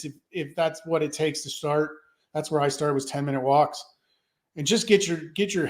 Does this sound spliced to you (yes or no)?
no